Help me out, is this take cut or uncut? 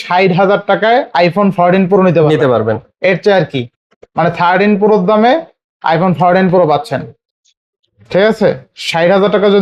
uncut